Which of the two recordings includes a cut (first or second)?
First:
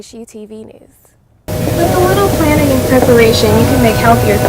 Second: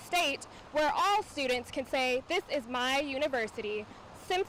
first